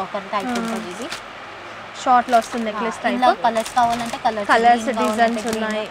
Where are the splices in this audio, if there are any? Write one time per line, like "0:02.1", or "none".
none